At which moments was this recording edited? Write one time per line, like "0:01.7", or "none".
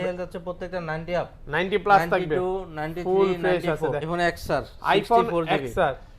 0:04.0